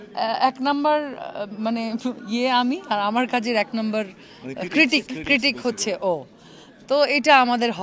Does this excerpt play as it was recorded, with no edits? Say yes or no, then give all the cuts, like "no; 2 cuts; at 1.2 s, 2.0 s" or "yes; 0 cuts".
yes; 0 cuts